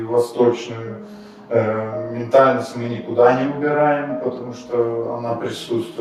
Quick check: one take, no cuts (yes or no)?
yes